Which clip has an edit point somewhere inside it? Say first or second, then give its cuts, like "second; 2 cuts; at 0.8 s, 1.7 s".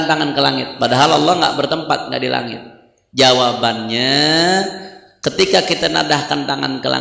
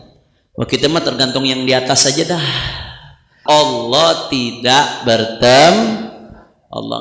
second; 1 cut; at 3.4 s